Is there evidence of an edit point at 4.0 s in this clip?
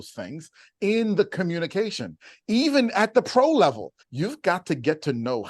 yes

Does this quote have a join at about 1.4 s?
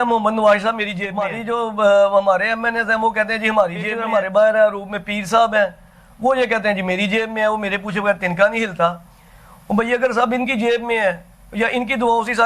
yes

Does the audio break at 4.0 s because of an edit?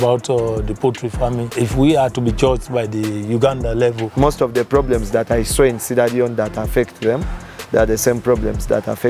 yes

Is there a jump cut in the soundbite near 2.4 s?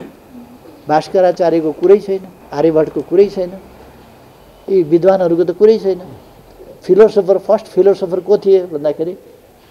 yes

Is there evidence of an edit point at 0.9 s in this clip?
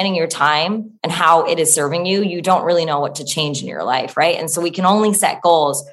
yes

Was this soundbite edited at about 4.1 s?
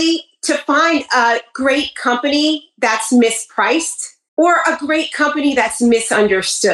no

